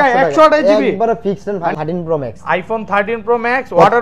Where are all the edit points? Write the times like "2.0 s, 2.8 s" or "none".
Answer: 1.7 s

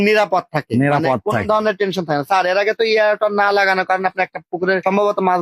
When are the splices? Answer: none

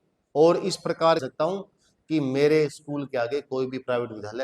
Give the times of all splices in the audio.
1.3 s

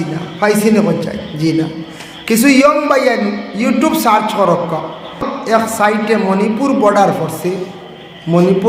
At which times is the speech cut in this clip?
5.3 s

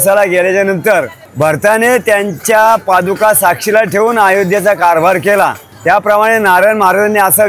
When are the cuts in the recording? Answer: 1.2 s, 5.7 s

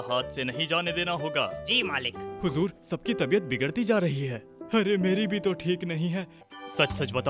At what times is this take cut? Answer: 2.2 s, 6.4 s

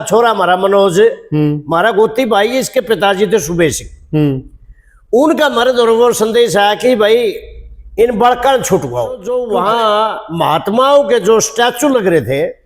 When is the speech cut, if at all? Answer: 9.2 s

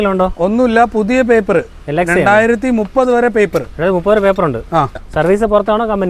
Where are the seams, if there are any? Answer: 5.0 s

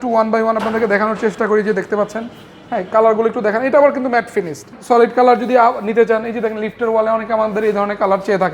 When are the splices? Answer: 4.7 s

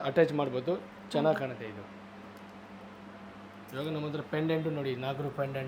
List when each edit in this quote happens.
none

